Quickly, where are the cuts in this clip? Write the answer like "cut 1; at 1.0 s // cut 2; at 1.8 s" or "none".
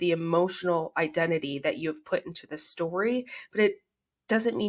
none